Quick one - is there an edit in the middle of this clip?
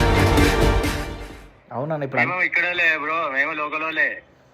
no; 0 cuts

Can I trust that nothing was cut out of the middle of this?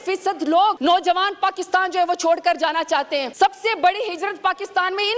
no; 2 cuts; at 0.8 s, 3.3 s

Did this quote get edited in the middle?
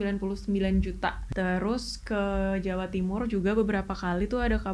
yes; 1 cut; at 1.2 s

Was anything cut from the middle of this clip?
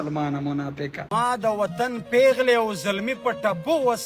yes; 1 cut; at 1.0 s

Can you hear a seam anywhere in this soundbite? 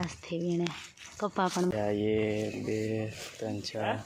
yes; 1 cut; at 1.7 s

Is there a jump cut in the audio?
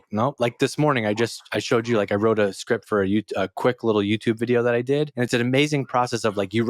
yes; 1 cut; at 5.1 s

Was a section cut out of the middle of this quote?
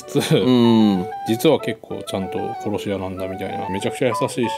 yes; 2 cuts; at 1.1 s, 3.6 s

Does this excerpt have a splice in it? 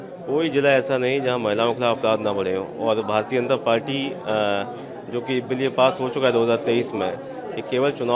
no; 0 cuts

